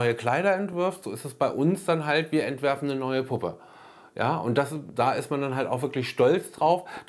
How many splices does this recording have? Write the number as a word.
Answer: zero